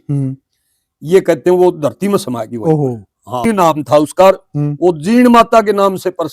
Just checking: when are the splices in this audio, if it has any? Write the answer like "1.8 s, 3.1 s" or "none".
3.4 s